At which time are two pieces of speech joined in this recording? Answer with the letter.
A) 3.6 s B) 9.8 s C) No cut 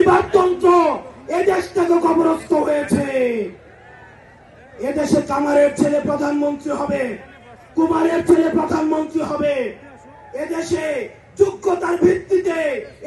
C